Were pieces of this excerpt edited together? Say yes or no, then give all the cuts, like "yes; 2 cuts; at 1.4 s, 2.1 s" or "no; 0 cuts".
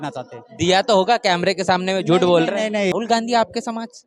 yes; 1 cut; at 2.9 s